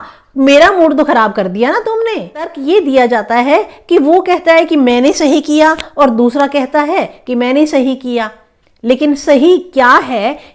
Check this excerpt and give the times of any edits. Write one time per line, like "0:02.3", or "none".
0:02.6